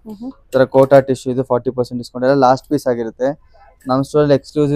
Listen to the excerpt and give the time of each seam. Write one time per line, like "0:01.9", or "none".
none